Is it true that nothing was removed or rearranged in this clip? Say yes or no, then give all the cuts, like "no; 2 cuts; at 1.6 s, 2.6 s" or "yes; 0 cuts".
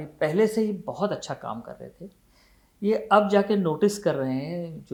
yes; 0 cuts